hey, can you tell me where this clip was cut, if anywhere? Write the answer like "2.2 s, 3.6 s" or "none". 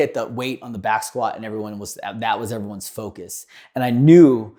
none